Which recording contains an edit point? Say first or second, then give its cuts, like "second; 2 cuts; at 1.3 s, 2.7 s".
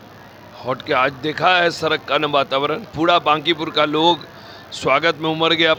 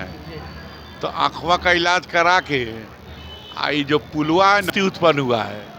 second; 1 cut; at 4.7 s